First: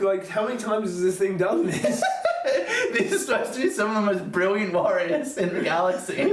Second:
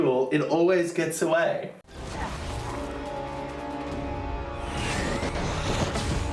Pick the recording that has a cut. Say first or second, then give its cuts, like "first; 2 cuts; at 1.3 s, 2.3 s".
second; 1 cut; at 2.0 s